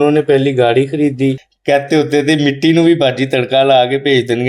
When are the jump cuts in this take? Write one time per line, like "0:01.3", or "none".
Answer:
0:01.5